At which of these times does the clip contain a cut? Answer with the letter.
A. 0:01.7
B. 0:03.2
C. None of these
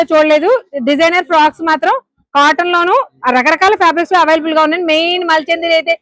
C